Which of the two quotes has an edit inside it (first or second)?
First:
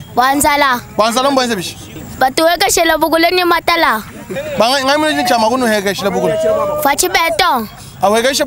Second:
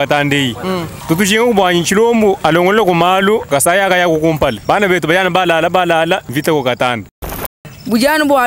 second